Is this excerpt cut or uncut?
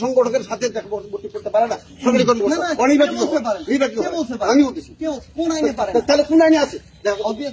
uncut